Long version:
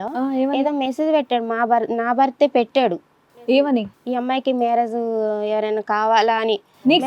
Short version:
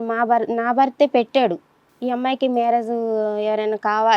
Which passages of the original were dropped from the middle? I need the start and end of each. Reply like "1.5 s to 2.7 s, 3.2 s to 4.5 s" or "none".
3.3 s to 4.0 s